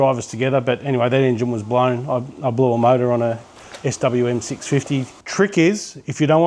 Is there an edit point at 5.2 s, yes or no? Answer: yes